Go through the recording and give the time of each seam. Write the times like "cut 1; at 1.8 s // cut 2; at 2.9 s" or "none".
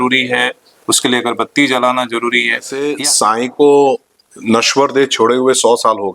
cut 1; at 2.8 s